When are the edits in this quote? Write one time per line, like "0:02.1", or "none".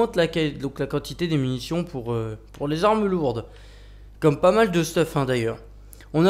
0:02.8